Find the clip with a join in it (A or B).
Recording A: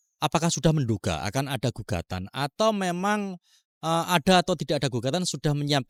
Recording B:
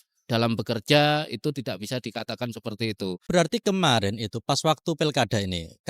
B